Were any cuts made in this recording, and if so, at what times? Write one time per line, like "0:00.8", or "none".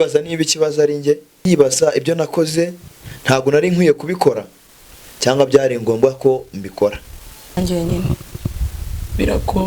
0:01.4
0:07.6